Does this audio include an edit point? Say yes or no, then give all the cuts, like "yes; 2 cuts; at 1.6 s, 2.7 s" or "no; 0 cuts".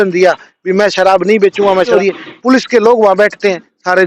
yes; 1 cut; at 1.9 s